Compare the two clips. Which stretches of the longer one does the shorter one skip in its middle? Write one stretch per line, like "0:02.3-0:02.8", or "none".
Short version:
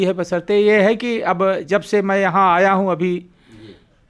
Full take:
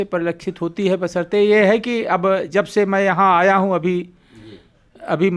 none

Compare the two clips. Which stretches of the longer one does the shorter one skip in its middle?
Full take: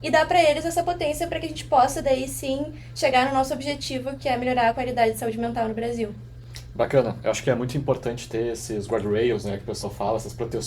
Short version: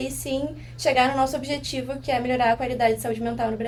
none

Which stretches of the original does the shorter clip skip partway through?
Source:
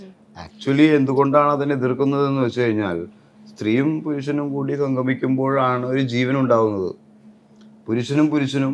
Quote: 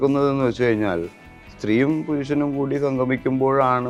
none

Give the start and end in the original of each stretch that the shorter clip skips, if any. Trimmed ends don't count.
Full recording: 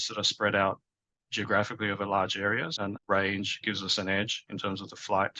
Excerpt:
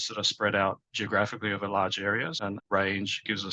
0:00.9-0:01.3

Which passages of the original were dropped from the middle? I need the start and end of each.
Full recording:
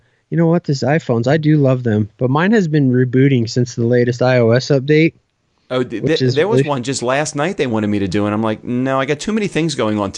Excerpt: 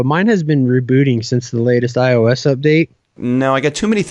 0:05.4-0:08.6

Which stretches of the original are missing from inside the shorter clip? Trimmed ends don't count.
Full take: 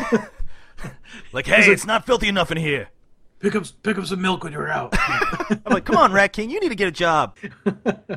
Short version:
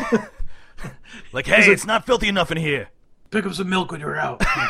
0:03.2-0:03.7

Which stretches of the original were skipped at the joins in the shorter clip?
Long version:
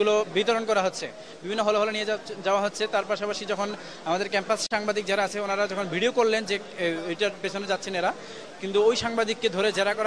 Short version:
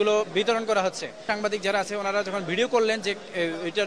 0:01.2-0:04.6

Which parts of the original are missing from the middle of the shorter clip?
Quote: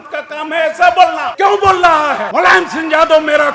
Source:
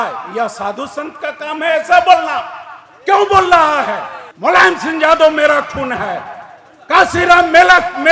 0:02.3-0:02.9
0:03.9-0:04.3

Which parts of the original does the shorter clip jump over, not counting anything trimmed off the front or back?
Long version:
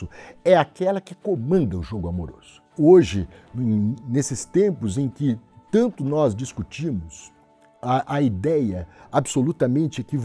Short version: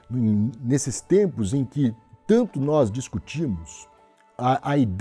none

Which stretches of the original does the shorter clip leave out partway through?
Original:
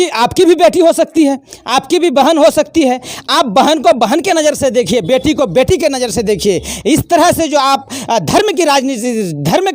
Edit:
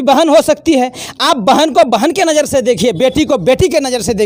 none

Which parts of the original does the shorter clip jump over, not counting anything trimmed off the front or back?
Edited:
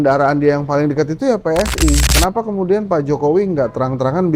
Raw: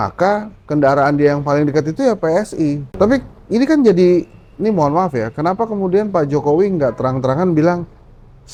0:02.9-0:05.3

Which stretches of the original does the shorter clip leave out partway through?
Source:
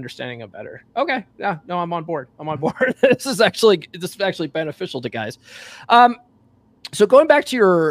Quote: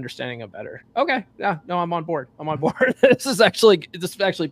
none

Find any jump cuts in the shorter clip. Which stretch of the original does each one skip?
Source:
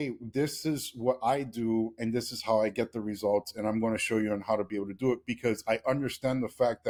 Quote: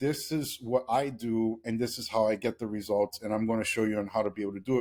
none

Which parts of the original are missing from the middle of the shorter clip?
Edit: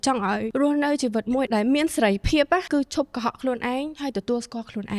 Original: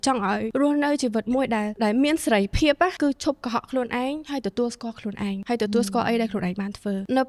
0:01.5-0:01.8

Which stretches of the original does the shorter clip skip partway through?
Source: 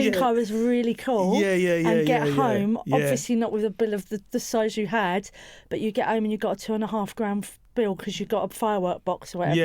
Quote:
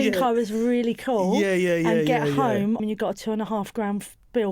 0:02.8-0:06.2

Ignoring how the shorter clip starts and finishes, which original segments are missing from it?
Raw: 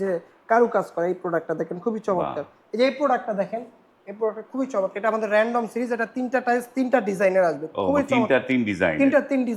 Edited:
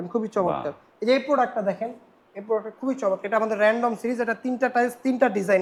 none

